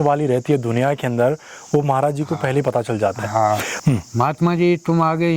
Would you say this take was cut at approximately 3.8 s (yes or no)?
yes